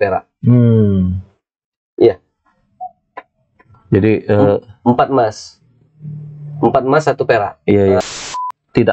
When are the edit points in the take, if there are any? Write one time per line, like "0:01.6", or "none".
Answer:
0:08.0